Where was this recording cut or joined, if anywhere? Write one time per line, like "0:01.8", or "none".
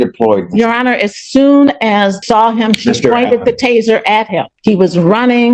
0:02.2
0:04.5